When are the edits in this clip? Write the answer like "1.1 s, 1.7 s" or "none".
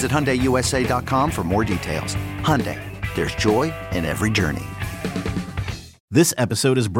6.0 s